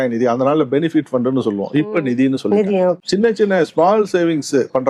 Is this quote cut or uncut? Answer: cut